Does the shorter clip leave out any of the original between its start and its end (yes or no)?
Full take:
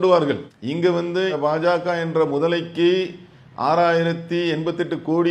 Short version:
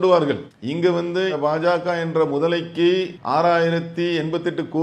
yes